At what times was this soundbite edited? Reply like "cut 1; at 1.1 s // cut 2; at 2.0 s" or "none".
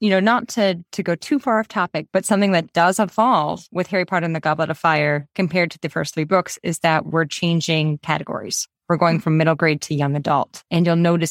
cut 1; at 2.0 s